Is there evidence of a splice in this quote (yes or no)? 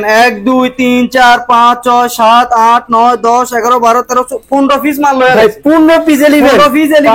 no